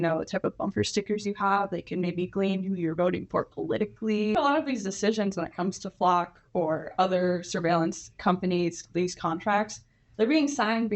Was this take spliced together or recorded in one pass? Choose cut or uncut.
cut